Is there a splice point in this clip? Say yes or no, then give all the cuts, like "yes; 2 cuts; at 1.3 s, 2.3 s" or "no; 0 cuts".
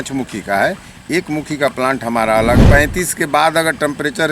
yes; 1 cut; at 2.6 s